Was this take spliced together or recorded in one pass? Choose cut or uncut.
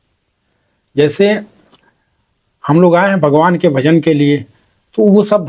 uncut